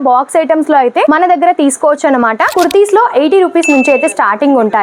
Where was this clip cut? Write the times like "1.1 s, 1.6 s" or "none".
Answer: 2.5 s